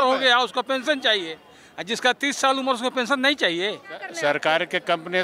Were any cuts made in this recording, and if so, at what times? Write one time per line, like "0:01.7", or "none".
0:04.1